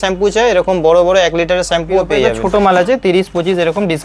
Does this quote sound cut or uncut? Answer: cut